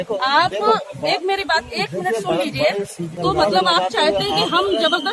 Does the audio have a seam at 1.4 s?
no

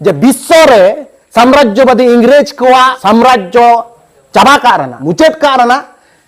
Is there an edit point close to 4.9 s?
yes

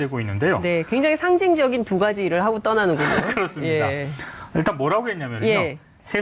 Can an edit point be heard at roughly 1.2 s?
no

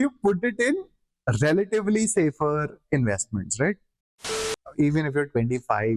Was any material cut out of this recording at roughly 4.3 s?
yes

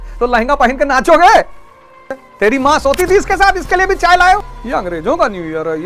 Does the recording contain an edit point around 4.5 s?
yes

